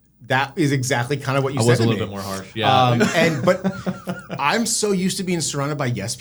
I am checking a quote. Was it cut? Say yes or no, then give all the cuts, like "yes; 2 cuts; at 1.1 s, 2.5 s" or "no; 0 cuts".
no; 0 cuts